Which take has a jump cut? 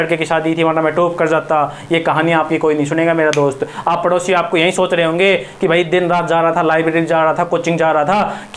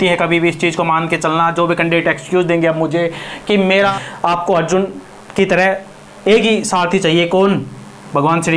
second; 1 cut; at 3.9 s

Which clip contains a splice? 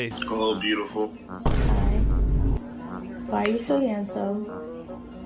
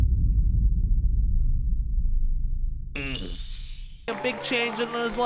second; 1 cut; at 4.1 s

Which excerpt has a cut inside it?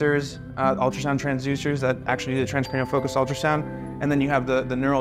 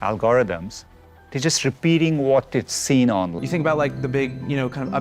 second; 1 cut; at 3.3 s

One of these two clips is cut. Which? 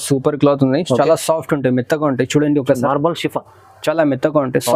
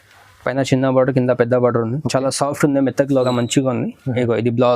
second; 1 cut; at 3.3 s

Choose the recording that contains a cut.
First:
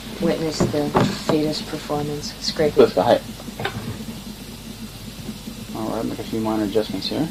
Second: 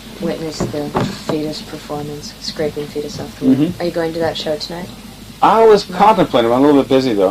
second; 1 cut; at 2.7 s

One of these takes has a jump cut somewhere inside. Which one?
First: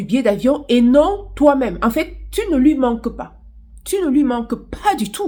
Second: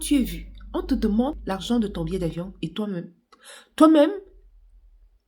second; 1 cut; at 1.4 s

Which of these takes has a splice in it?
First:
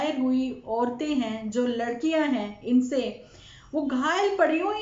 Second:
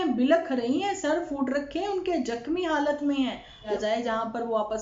second; 1 cut; at 3.7 s

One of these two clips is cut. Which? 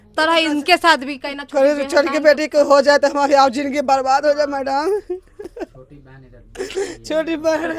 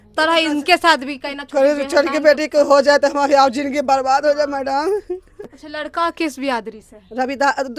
second; 1 cut; at 5.5 s

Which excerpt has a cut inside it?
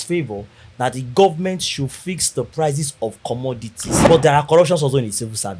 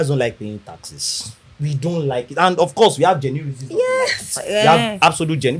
first; 1 cut; at 4.1 s

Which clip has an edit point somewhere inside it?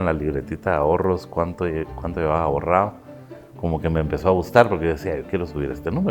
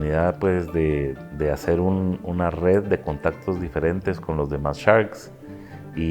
second; 1 cut; at 1.2 s

